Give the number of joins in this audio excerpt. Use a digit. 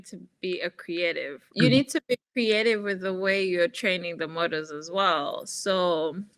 1